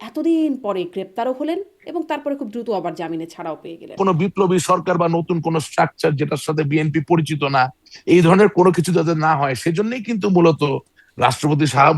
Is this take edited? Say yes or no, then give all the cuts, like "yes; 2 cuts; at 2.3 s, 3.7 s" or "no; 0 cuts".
yes; 1 cut; at 4.0 s